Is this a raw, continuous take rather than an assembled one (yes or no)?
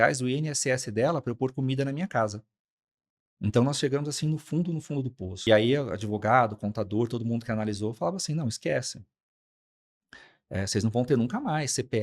no